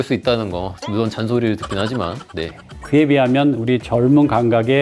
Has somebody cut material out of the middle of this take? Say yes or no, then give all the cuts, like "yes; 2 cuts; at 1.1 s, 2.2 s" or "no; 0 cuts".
yes; 1 cut; at 2.7 s